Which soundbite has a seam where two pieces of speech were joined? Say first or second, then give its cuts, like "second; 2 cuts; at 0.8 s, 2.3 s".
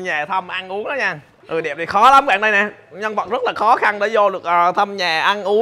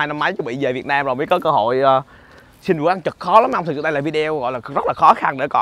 first; 1 cut; at 1.4 s